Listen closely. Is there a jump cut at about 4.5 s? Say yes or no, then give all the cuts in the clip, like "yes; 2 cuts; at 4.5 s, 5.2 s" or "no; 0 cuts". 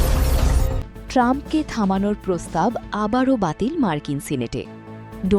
no; 1 cut; at 1.0 s